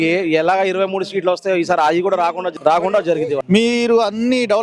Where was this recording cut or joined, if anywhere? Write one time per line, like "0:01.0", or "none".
0:02.4
0:03.4